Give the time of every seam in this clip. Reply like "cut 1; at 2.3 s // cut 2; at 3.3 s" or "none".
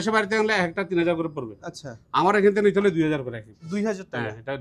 none